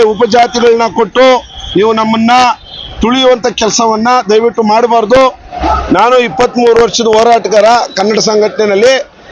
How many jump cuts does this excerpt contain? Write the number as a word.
one